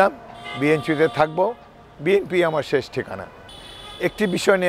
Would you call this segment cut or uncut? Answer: uncut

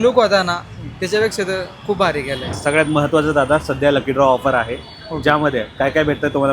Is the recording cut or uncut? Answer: cut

